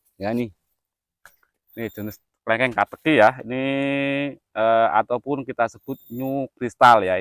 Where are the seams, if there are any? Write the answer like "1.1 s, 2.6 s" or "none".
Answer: none